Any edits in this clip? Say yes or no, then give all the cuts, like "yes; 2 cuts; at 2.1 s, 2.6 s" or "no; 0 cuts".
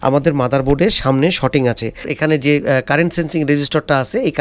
yes; 1 cut; at 2.0 s